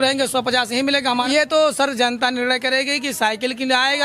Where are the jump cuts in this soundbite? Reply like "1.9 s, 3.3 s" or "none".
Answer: 1.2 s